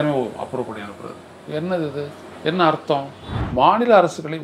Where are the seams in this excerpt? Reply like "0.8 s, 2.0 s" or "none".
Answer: 3.2 s